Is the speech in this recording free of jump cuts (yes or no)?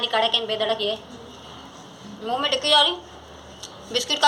no